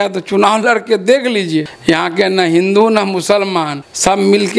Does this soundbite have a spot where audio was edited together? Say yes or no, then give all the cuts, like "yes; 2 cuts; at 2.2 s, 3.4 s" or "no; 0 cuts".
no; 0 cuts